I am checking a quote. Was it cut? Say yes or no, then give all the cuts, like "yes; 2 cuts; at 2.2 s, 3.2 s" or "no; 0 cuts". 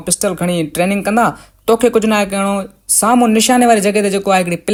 no; 0 cuts